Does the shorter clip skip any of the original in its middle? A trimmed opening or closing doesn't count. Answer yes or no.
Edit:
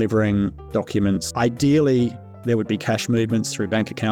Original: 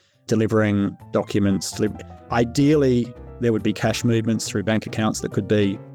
yes